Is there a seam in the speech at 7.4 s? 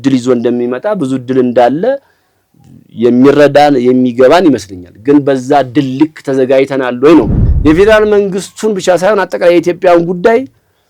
yes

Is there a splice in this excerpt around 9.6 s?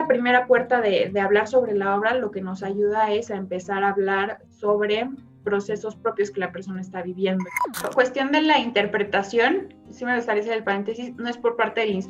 no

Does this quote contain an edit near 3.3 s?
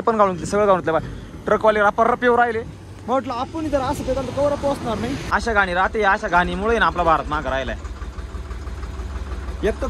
no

